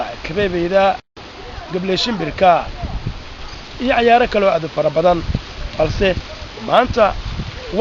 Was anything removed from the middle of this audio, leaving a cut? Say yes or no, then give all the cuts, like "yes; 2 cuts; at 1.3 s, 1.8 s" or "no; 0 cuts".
yes; 1 cut; at 1.1 s